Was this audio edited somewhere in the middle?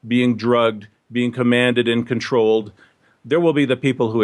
yes; 1 cut; at 3.0 s

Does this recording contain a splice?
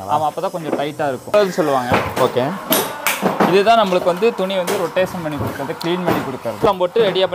yes; 2 cuts; at 1.3 s, 6.6 s

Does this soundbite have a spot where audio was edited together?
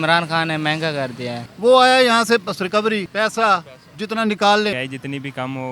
yes; 3 cuts; at 1.5 s, 3.1 s, 4.7 s

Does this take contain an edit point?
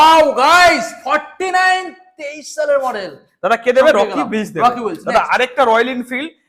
no; 0 cuts

